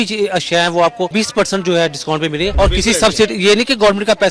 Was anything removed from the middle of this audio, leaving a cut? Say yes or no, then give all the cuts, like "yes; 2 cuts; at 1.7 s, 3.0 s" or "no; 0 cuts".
yes; 2 cuts; at 1.1 s, 2.5 s